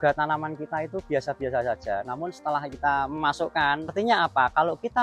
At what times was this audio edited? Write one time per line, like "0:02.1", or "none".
0:03.9